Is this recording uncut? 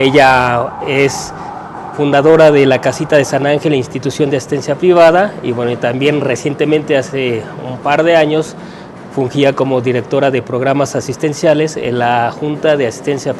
no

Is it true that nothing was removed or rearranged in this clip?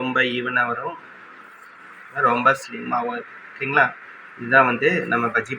yes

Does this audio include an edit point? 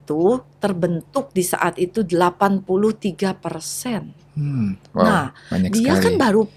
no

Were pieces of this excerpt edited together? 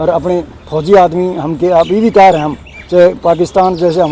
no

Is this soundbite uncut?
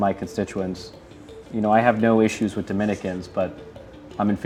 yes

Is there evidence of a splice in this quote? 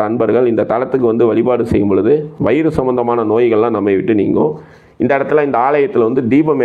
no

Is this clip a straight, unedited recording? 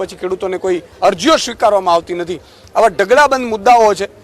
yes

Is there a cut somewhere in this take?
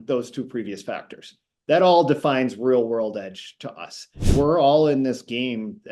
yes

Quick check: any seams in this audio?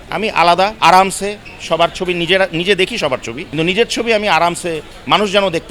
no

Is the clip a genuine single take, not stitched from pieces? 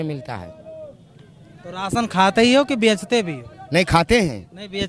yes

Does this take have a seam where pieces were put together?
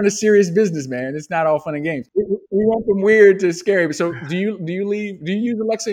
yes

